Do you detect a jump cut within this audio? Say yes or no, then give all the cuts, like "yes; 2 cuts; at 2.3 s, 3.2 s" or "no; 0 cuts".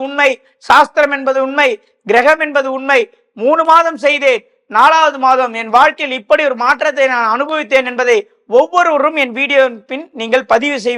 no; 0 cuts